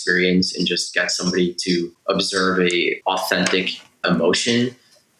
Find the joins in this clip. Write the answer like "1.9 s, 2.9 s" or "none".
1.9 s, 3.0 s, 4.0 s